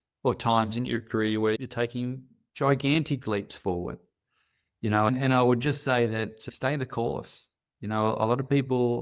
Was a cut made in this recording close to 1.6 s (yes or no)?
yes